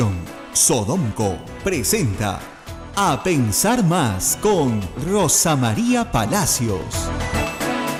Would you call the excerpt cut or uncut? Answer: uncut